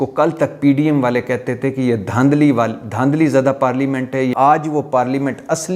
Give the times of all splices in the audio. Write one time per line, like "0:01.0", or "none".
0:04.3